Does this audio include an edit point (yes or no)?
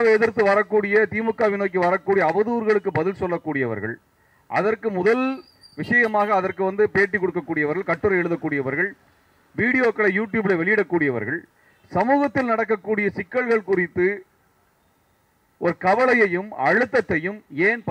no